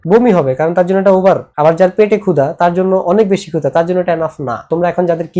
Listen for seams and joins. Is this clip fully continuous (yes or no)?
no